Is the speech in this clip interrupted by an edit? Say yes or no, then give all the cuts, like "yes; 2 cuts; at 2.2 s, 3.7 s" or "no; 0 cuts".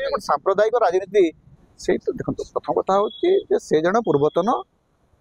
yes; 1 cut; at 1.5 s